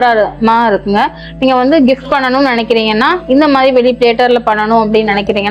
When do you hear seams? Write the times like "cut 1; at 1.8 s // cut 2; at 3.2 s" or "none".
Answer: none

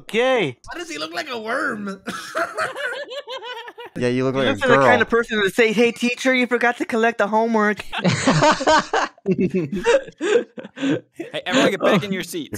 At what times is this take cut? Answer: cut 1; at 3.9 s // cut 2; at 7.9 s

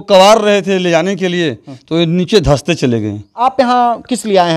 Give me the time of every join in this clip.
cut 1; at 3.2 s

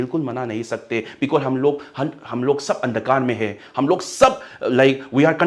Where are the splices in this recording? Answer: none

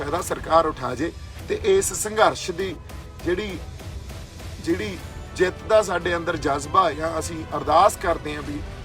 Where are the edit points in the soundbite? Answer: none

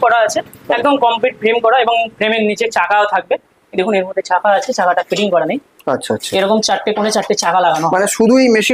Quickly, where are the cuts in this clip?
none

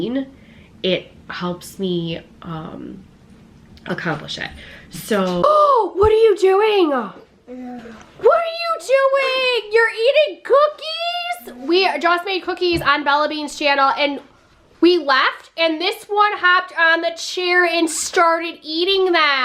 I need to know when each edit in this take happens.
cut 1; at 5.4 s

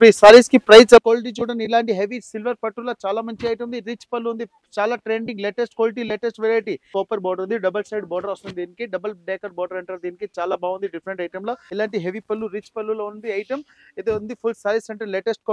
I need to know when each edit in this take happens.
cut 1; at 1.0 s // cut 2; at 6.9 s // cut 3; at 11.6 s

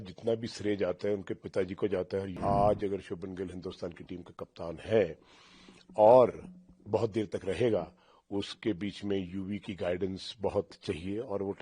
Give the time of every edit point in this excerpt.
cut 1; at 2.4 s

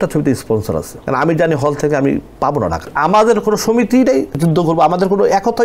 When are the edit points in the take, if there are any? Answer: cut 1; at 0.9 s // cut 2; at 2.9 s // cut 3; at 4.4 s

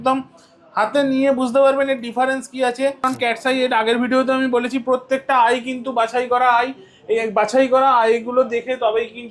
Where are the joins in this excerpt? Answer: cut 1; at 3.1 s

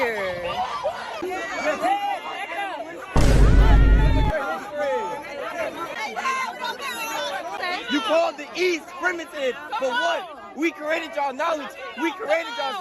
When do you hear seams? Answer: none

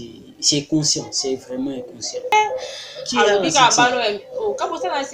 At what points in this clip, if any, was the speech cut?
cut 1; at 2.3 s

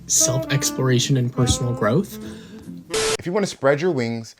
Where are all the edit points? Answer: cut 1; at 3.0 s

